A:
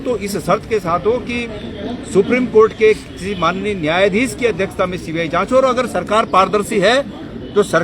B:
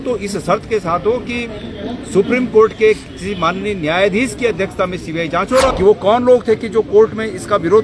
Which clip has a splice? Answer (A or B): B